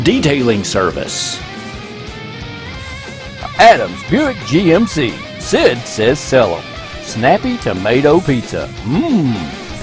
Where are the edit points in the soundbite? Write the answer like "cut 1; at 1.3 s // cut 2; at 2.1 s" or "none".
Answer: none